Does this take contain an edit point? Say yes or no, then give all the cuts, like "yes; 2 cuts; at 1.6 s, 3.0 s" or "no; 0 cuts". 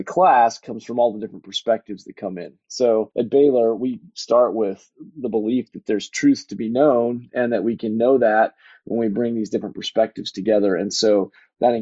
yes; 1 cut; at 3.1 s